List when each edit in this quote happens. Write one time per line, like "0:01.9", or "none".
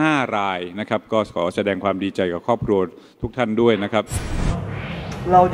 0:04.2

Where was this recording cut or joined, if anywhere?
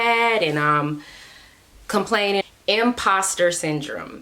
0:02.4

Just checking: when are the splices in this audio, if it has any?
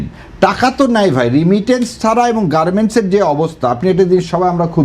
none

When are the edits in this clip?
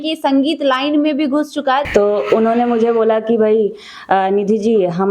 0:01.8

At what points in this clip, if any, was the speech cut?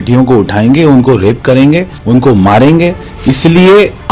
0:01.9
0:03.1

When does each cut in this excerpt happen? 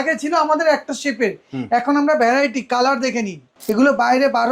0:03.5

